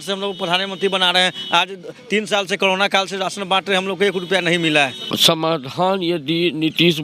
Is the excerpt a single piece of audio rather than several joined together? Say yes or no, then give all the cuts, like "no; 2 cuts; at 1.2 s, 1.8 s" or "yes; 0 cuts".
no; 1 cut; at 5.2 s